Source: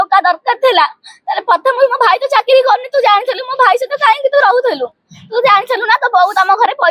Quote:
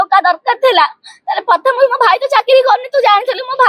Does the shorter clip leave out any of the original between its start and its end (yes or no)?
no